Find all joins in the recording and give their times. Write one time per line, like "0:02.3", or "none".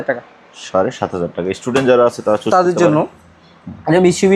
none